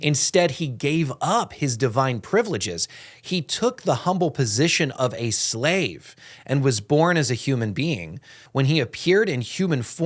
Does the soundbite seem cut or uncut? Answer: cut